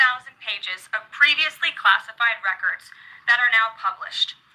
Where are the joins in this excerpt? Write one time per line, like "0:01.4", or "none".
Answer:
none

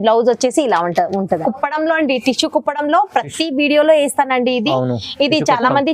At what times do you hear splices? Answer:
0:01.4

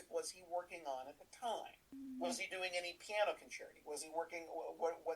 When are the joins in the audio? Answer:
0:01.9

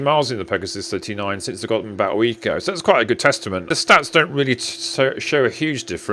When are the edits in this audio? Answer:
0:03.7

